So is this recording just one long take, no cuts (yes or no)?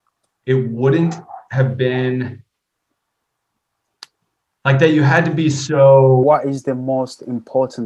no